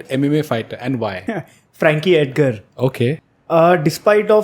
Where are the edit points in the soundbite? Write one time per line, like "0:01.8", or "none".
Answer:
0:01.2
0:03.3